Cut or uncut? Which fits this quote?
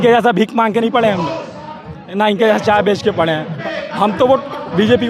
cut